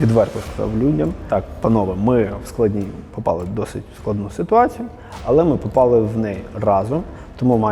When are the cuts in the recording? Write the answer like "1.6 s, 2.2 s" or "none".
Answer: 1.2 s

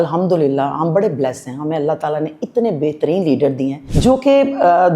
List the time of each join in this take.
3.8 s

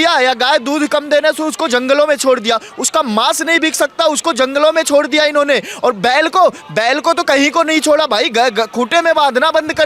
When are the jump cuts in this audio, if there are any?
none

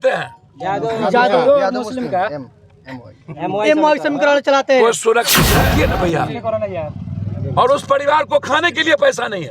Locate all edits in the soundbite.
5.5 s

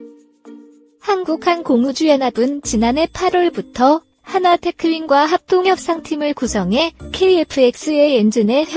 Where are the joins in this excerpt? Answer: 1.0 s

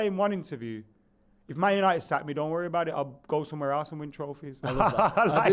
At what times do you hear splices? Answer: none

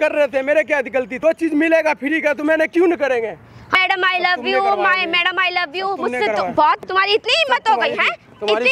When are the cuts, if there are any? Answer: 1.1 s, 3.6 s, 6.8 s

